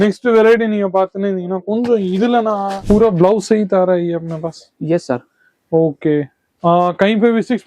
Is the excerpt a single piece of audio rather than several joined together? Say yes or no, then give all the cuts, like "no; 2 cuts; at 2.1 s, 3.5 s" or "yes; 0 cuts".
no; 1 cut; at 2.8 s